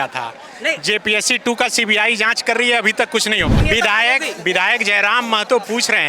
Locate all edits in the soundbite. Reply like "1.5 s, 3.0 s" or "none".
3.6 s